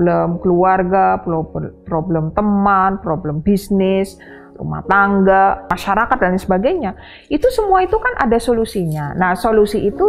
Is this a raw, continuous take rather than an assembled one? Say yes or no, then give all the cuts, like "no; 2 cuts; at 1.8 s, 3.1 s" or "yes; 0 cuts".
no; 1 cut; at 5.7 s